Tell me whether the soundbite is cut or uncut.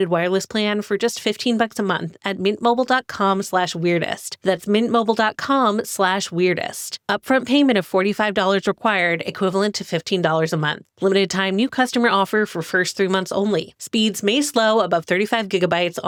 uncut